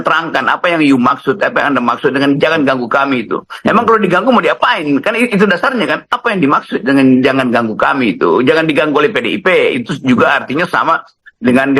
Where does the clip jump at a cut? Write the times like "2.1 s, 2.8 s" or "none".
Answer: 6.1 s